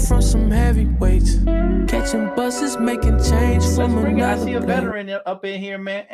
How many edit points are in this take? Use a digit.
1